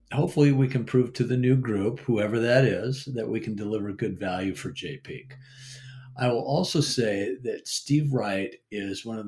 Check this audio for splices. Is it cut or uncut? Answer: uncut